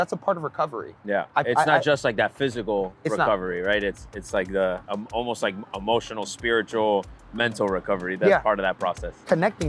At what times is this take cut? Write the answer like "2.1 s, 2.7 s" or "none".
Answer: none

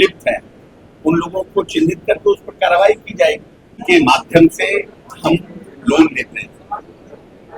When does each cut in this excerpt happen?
3.8 s

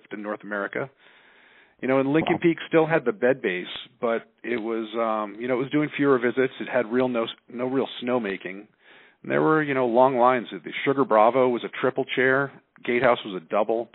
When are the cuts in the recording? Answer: none

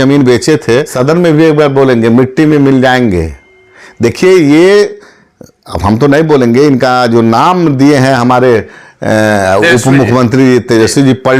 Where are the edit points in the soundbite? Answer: 0.9 s

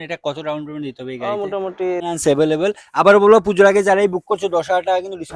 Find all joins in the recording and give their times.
2.0 s

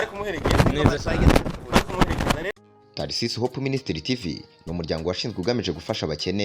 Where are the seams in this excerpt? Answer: 2.5 s

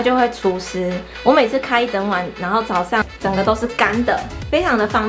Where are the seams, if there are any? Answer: 3.0 s

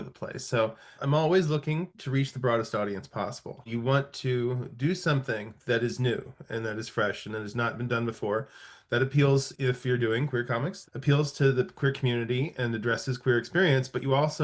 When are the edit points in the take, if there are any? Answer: 1.0 s, 3.7 s, 10.8 s

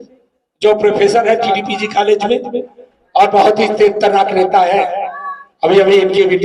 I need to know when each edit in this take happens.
1.5 s

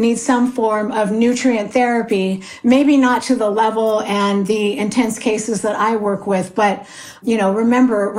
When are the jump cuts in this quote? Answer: none

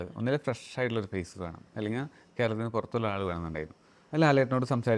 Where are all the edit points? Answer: none

